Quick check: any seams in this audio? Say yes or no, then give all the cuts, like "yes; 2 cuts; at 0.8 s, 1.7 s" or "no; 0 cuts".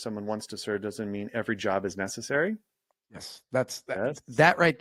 no; 0 cuts